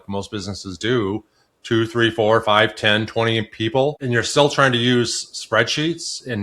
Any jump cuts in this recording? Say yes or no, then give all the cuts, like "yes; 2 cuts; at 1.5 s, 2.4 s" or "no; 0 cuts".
yes; 1 cut; at 4.0 s